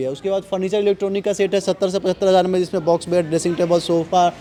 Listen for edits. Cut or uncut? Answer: uncut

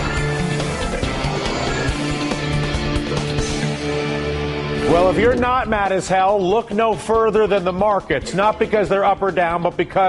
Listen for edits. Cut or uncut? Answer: uncut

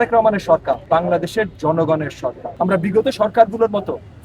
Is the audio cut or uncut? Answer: cut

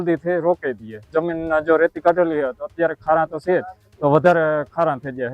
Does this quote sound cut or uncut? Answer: cut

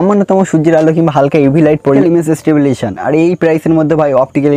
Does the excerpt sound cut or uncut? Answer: cut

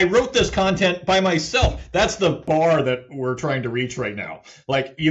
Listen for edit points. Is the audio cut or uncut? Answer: cut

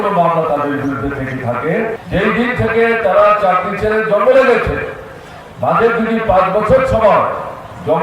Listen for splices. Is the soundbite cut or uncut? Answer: cut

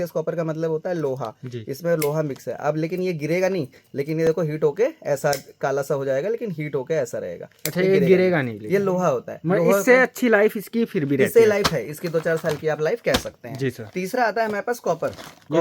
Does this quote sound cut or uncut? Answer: uncut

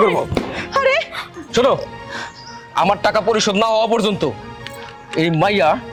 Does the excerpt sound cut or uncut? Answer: uncut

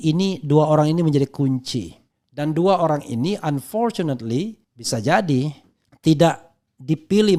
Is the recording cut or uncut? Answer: uncut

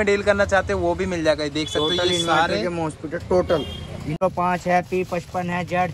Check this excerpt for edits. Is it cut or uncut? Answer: cut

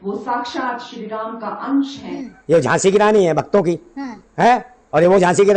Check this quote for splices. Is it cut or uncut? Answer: cut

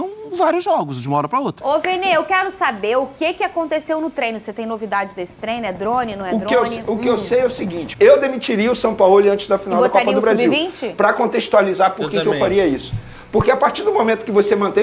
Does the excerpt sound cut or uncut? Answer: cut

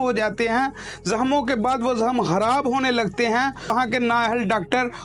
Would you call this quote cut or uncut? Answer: cut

